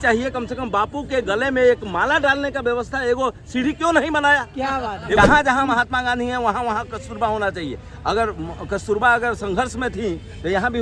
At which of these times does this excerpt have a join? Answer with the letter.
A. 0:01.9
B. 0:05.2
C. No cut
B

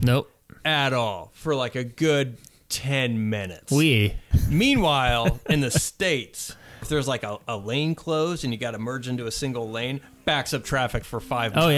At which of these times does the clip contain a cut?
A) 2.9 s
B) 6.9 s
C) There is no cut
B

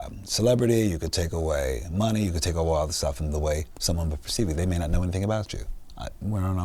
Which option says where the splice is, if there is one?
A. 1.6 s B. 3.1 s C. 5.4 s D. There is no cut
D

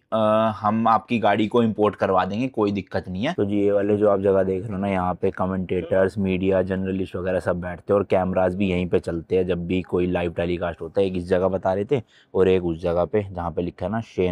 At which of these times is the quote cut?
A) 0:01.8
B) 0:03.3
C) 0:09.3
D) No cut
B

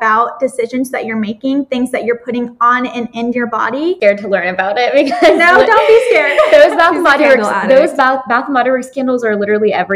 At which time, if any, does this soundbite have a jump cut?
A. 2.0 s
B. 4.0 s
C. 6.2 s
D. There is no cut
B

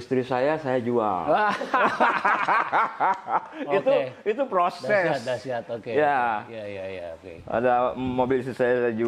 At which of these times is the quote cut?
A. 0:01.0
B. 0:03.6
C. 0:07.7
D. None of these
D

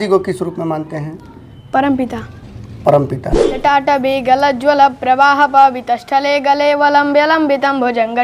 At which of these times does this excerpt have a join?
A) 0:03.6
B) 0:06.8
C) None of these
A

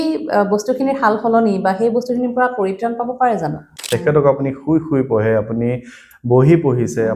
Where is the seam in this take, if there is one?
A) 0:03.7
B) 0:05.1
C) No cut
A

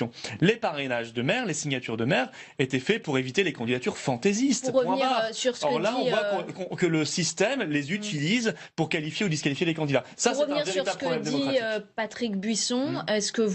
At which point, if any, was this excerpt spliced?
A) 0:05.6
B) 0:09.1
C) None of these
A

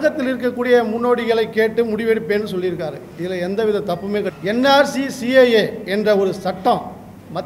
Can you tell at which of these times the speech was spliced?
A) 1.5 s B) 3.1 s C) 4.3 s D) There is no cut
C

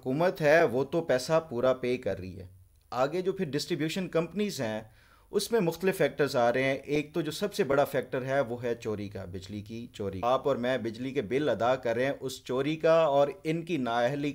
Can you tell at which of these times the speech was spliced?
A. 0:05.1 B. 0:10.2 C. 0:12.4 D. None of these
B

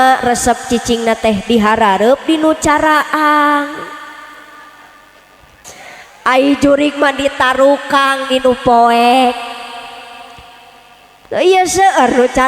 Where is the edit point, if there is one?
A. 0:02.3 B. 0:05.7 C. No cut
B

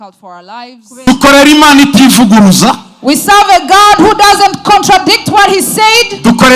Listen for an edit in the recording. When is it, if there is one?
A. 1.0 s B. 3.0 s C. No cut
A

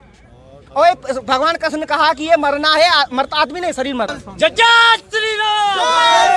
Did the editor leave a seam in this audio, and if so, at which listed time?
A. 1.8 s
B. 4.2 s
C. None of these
B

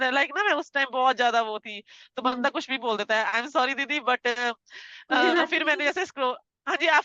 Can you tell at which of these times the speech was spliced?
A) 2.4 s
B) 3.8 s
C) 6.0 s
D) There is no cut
D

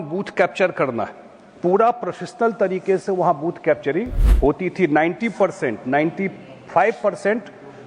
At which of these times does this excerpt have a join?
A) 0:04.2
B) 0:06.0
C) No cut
A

